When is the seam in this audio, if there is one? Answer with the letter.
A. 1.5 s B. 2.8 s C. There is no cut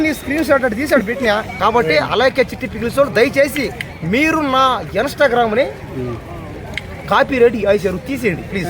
A